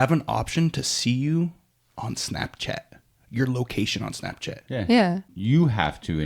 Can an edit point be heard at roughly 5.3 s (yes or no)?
yes